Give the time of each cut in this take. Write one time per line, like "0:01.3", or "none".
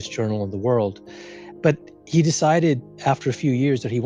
none